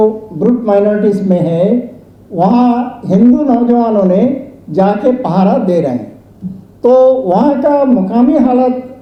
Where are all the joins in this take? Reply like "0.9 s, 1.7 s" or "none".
none